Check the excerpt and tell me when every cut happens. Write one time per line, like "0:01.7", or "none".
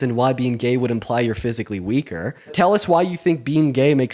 0:02.5